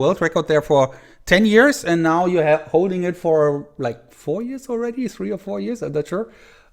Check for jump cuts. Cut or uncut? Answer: uncut